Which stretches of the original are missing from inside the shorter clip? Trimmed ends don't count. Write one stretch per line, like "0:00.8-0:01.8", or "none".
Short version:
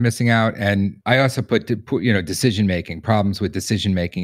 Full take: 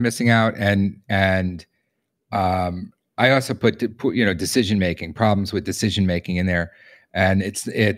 0:01.0-0:03.1

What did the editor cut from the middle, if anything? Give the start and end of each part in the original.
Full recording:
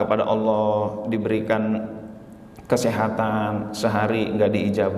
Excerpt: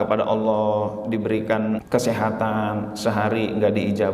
0:01.8-0:02.6

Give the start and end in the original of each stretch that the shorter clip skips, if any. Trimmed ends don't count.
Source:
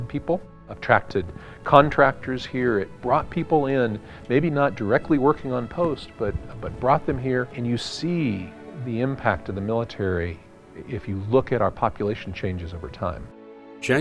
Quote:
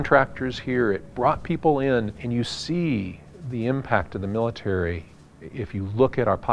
0:04.1-0:07.5

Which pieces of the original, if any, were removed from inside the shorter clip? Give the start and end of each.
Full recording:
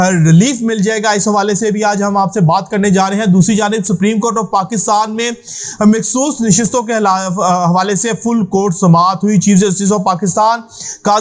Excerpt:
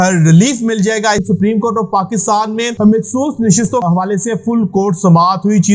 0:01.2-0:03.8
0:05.3-0:05.7
0:06.8-0:07.6

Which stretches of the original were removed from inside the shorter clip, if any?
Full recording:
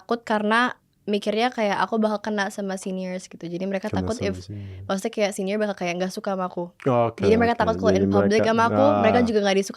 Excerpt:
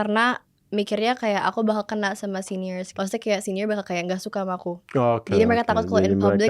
0:03.2-0:04.8

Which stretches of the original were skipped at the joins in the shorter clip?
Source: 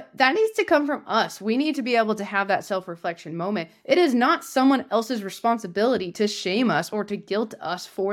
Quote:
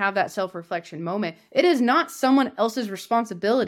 none

